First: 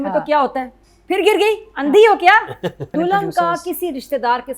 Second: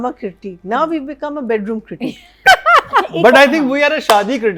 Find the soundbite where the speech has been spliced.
first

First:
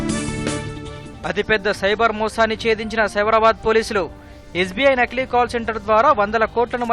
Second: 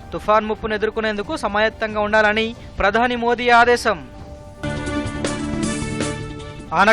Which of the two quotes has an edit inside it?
first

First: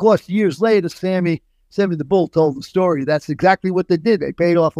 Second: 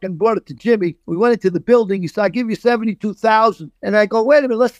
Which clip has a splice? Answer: second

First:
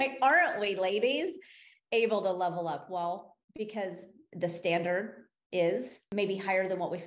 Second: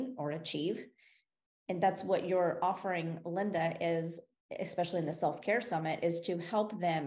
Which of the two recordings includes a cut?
first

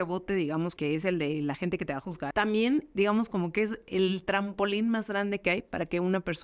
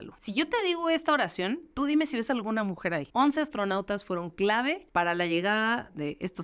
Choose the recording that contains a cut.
first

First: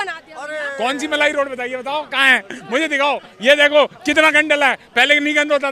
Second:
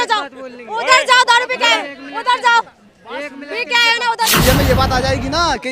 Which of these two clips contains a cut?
second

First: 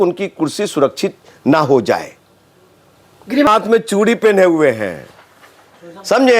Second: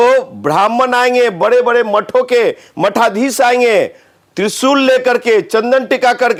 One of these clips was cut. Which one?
first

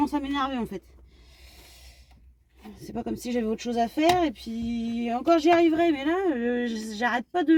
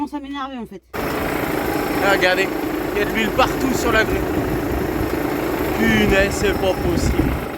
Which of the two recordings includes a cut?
second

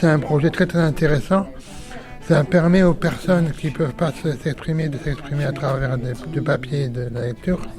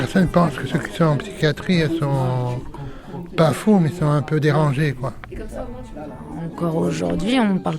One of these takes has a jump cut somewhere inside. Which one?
second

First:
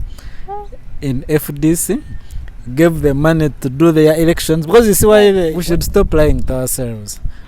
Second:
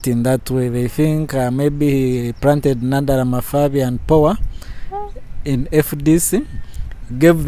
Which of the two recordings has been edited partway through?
first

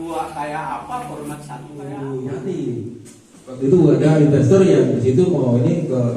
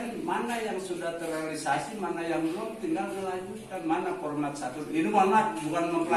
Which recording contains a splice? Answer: first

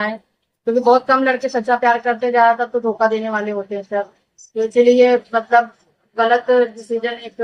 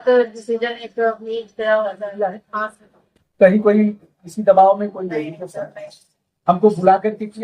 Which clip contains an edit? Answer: second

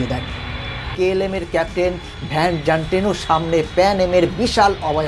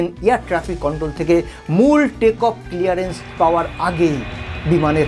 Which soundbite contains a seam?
first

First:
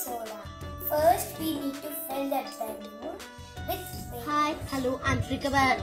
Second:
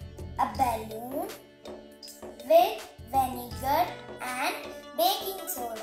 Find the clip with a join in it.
first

